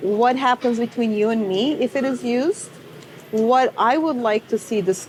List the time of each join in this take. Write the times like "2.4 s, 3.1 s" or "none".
none